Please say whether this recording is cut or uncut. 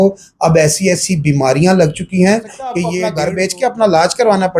cut